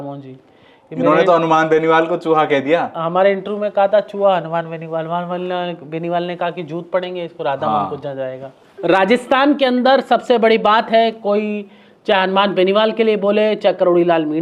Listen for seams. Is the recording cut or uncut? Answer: uncut